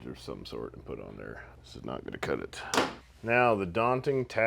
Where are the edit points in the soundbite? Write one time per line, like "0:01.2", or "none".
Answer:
0:03.0